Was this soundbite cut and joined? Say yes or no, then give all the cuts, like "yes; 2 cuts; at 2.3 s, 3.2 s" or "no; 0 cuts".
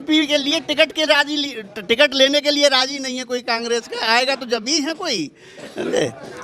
no; 0 cuts